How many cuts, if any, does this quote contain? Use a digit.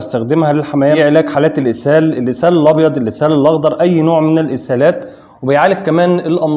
1